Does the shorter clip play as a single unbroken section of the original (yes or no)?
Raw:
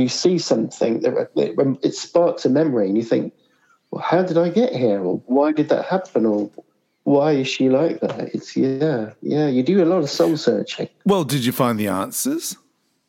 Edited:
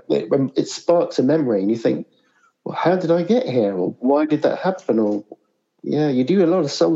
no